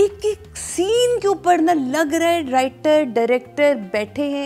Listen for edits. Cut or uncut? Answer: uncut